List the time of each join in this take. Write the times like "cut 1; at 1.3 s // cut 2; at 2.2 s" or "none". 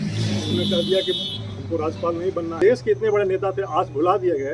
cut 1; at 2.6 s

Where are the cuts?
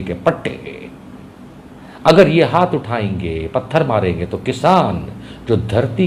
none

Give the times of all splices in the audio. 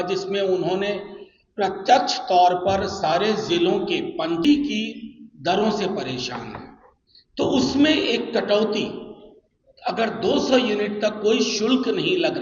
cut 1; at 4.4 s

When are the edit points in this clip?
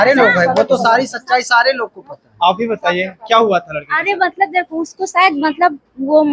none

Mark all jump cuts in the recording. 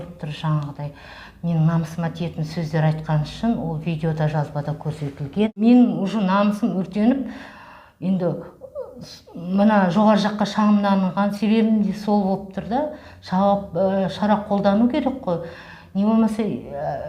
cut 1; at 5.6 s

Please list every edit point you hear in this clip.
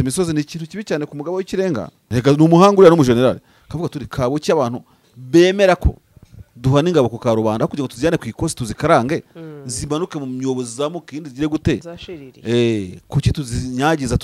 cut 1; at 2.0 s

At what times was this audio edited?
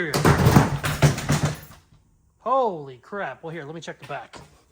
none

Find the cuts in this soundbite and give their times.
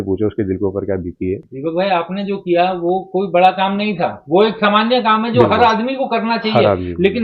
cut 1; at 1.5 s

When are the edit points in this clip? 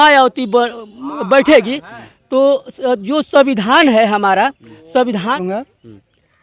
cut 1; at 5.3 s

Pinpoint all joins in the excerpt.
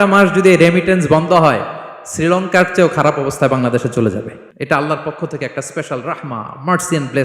cut 1; at 4.4 s

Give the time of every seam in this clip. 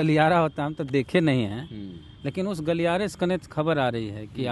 none

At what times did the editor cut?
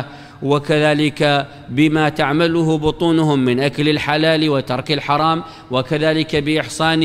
cut 1; at 0.8 s // cut 2; at 2.5 s // cut 3; at 4.2 s // cut 4; at 5.6 s

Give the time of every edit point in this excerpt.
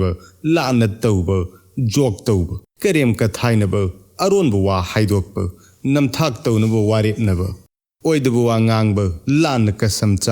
cut 1; at 2.6 s

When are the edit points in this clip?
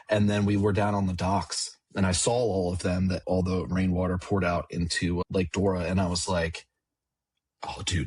cut 1; at 3.2 s // cut 2; at 5.2 s

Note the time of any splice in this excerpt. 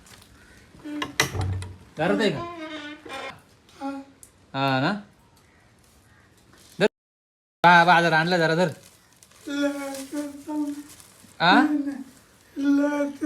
cut 1; at 3.4 s

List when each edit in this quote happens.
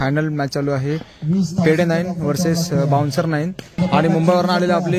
cut 1; at 3.8 s

